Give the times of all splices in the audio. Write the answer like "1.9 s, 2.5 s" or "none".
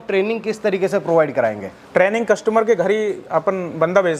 none